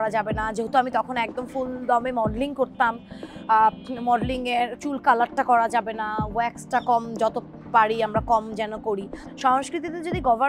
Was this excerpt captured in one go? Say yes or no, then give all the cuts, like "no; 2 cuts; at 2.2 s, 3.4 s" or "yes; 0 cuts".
no; 1 cut; at 9.2 s